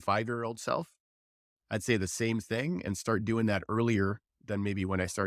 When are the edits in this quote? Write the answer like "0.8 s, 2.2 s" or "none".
none